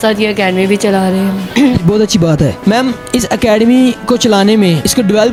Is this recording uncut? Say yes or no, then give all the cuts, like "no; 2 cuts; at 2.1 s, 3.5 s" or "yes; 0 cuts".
yes; 0 cuts